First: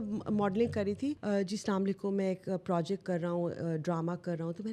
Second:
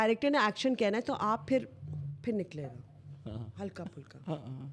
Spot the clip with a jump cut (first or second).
first